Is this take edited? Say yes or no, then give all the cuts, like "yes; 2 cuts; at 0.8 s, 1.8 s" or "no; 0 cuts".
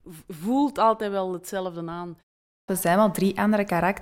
yes; 1 cut; at 2.5 s